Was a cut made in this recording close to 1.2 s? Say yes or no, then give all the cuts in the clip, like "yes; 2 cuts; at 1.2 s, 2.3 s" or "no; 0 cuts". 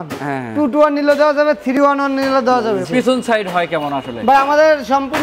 no; 1 cut; at 2.8 s